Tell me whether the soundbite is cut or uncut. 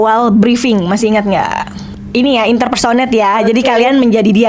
cut